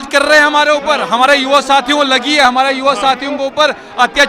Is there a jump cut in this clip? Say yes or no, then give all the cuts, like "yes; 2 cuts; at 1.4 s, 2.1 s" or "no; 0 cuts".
no; 0 cuts